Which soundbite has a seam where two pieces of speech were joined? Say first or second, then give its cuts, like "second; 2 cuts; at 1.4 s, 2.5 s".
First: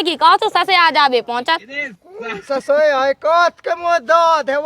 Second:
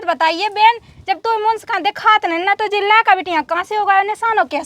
first; 1 cut; at 2.0 s